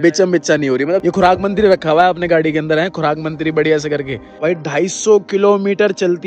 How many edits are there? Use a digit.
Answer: 2